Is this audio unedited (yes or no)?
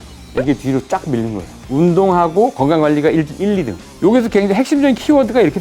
no